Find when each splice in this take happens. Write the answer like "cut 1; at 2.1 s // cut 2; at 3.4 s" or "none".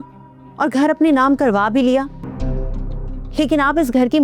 cut 1; at 2.3 s